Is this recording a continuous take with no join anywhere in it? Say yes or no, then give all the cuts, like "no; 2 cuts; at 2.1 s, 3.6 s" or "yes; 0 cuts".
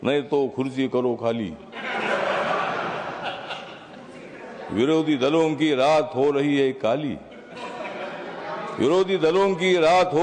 yes; 0 cuts